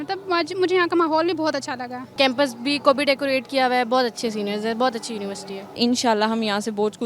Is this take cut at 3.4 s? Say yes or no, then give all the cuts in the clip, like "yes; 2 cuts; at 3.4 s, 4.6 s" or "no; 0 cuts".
no; 2 cuts; at 2.1 s, 5.8 s